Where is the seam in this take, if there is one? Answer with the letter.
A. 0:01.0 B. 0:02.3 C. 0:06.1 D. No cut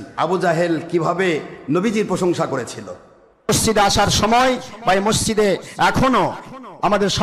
D